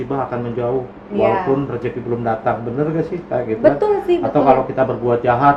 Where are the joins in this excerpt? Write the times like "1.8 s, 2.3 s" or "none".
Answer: none

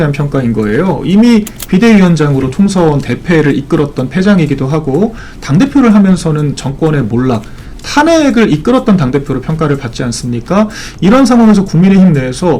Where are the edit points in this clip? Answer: none

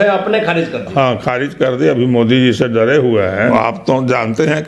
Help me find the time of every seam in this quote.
3.5 s

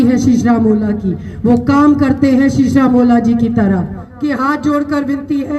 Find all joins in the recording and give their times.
4.0 s

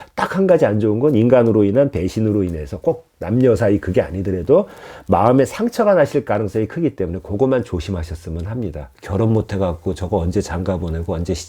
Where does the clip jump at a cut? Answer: 8.9 s

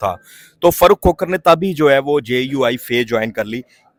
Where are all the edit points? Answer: none

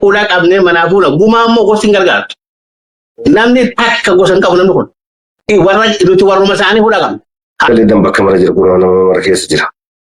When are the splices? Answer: 7.7 s

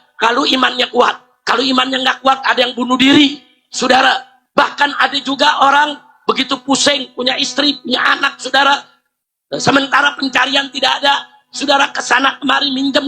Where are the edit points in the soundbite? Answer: 4.4 s

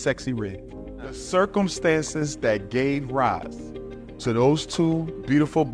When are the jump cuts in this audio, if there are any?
1.2 s

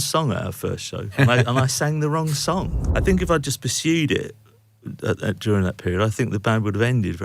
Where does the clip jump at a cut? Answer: 1.1 s, 2.8 s

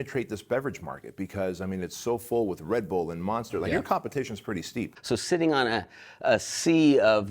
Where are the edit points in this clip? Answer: 5.0 s

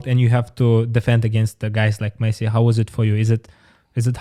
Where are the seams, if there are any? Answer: none

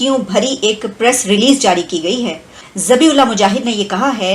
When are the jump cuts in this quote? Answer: none

